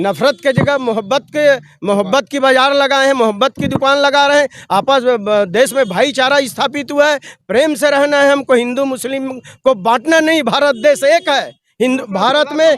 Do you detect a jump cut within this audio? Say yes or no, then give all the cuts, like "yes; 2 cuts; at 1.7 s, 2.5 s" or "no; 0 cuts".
no; 0 cuts